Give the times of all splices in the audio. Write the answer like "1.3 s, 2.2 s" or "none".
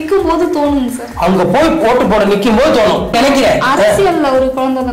3.1 s